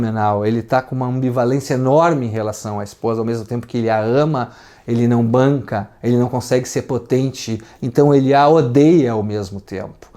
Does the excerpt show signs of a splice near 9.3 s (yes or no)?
no